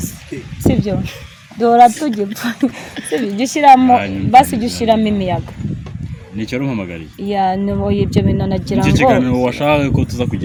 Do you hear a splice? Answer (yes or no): no